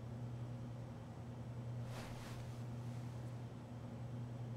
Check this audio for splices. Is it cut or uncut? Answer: cut